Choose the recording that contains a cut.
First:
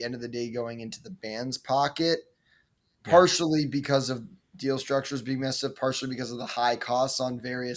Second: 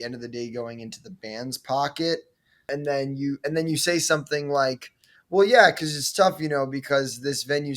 second; 1 cut; at 2.7 s

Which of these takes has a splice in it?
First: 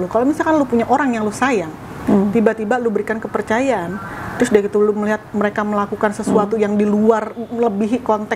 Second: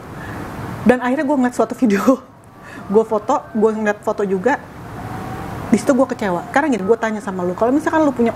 second; 1 cut; at 6.4 s

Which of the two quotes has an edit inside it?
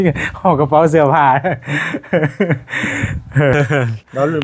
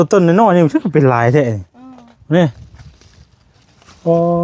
first; 1 cut; at 3.5 s

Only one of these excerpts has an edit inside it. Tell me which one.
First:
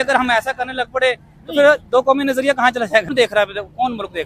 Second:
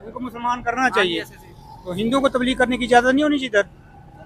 first; 1 cut; at 3.1 s

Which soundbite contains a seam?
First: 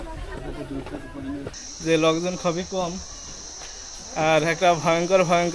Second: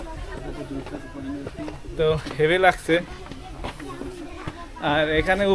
first; 1 cut; at 1.5 s

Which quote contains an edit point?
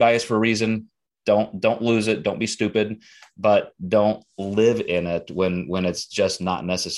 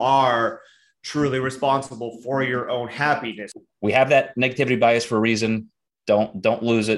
second; 1 cut; at 3.5 s

